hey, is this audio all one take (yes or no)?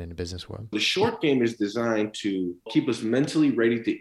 no